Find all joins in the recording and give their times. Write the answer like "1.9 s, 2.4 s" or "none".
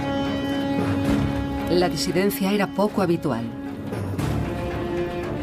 none